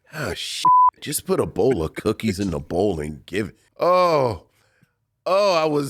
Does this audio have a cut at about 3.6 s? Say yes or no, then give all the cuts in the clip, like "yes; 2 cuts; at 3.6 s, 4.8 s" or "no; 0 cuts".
yes; 1 cut; at 3.6 s